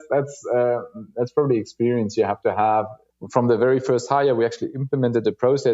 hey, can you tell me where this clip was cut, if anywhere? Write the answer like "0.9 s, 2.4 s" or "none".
3.0 s